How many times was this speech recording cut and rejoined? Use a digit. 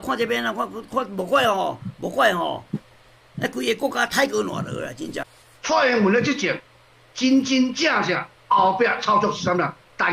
1